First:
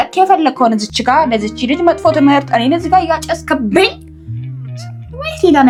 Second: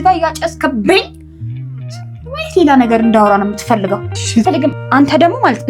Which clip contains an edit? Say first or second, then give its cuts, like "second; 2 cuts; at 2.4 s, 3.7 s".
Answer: second; 1 cut; at 4.4 s